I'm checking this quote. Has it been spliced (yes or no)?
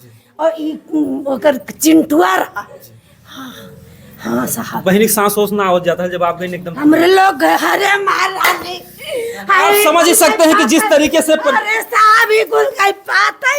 no